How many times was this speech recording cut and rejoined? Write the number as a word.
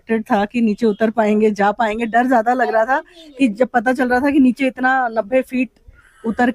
zero